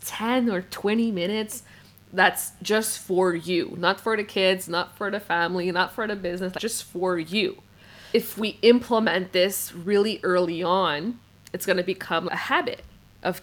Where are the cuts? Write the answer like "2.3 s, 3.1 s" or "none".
6.6 s, 8.1 s, 12.3 s